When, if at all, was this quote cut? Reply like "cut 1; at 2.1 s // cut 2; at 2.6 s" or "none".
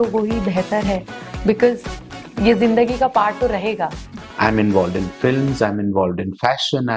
cut 1; at 4.2 s